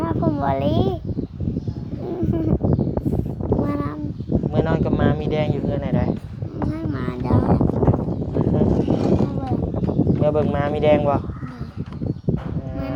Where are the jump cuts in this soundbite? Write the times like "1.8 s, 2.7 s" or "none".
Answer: none